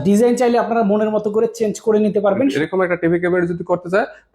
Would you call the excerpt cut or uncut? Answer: cut